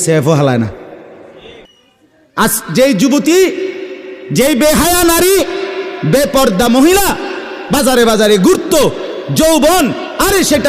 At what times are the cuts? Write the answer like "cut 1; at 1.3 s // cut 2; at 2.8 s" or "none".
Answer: cut 1; at 1.7 s